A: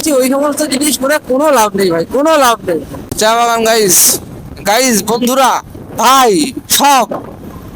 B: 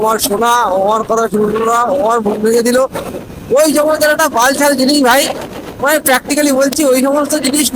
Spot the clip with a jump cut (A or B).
A